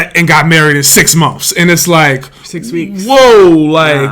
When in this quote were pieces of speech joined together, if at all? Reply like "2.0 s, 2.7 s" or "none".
none